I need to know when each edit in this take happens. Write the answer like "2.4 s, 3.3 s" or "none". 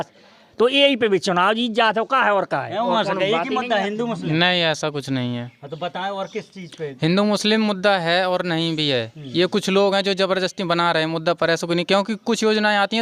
none

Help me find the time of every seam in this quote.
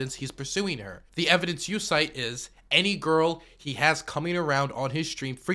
1.0 s

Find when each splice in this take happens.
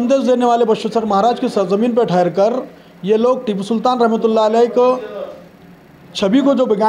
none

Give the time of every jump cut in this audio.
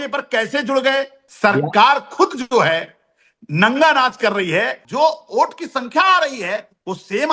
1.2 s, 4.8 s

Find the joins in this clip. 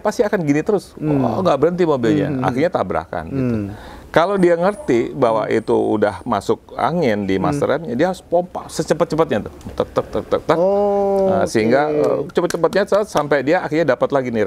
none

